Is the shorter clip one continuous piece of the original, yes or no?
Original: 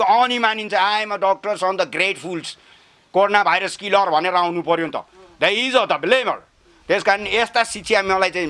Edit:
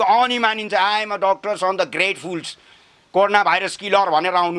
yes